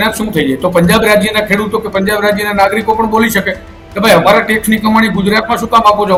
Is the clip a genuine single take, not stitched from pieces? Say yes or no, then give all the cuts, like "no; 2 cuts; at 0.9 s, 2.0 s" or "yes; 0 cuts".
yes; 0 cuts